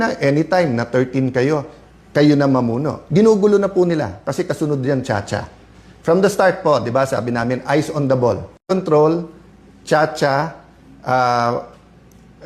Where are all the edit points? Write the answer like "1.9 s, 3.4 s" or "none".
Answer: 3.0 s